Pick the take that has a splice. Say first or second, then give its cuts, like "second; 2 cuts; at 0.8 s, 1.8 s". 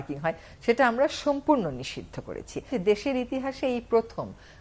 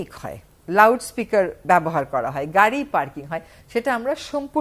first; 1 cut; at 2.7 s